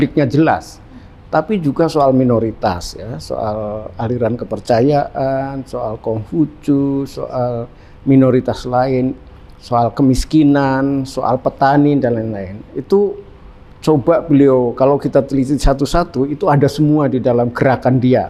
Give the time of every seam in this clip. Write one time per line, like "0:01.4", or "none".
none